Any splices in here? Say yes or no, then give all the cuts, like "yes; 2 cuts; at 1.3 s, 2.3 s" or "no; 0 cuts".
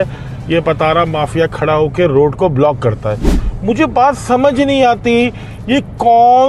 no; 0 cuts